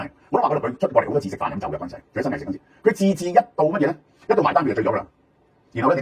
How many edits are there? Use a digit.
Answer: 0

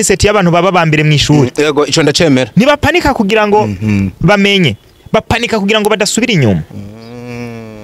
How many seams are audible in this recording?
0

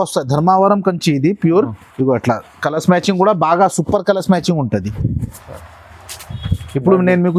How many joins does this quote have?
1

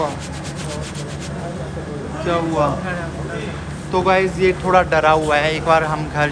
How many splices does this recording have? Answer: 0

